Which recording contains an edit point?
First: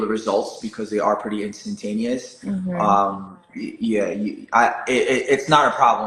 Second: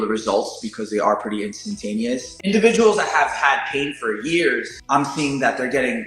second; 2 cuts; at 2.3 s, 4.7 s

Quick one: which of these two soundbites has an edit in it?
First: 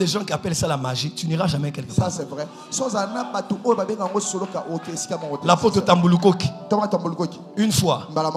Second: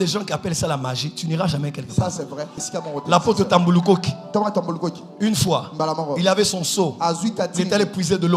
second; 1 cut; at 2.6 s

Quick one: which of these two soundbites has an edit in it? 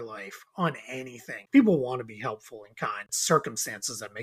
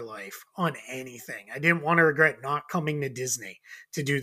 first; 2 cuts; at 1.4 s, 3.1 s

